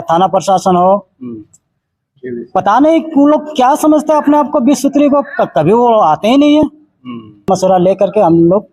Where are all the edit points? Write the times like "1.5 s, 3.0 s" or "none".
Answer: 7.5 s

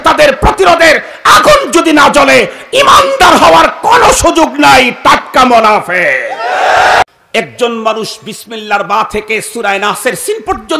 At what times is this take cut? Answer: 7.0 s

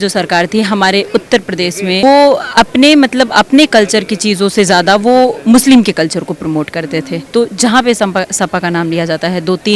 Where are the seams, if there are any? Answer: 2.0 s, 7.2 s

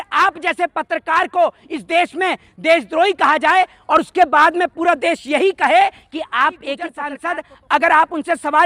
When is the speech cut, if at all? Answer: 7.1 s

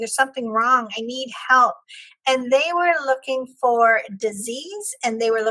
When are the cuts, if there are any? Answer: none

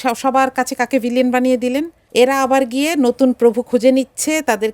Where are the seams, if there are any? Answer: 2.0 s

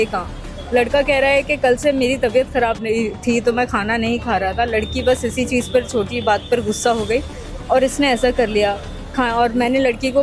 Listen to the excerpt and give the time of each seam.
none

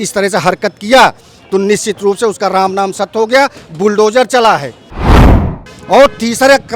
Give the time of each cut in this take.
5.2 s

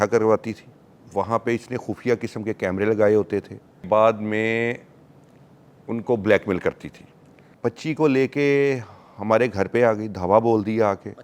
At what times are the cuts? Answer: 1.0 s, 3.8 s, 7.5 s

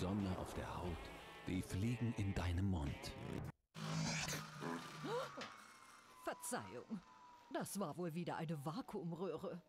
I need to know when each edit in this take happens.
3.4 s

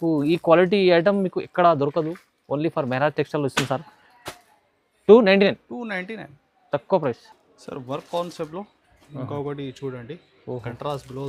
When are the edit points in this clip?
none

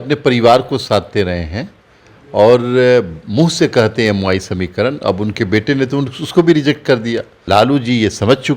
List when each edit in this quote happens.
7.3 s

